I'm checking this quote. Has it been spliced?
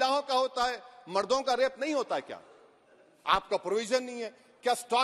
no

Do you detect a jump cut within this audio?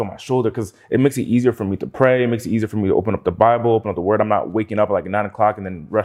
no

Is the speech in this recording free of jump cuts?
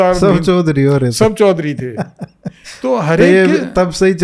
yes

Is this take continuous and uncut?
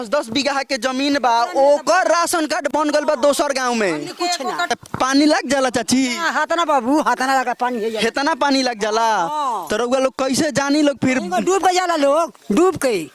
no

